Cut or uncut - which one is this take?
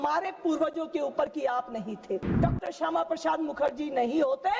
cut